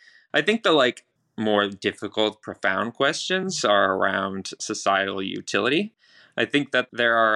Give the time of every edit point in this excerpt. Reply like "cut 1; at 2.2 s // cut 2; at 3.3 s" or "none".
cut 1; at 1.1 s